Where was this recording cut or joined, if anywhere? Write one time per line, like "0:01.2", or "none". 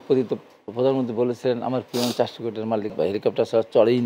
0:02.9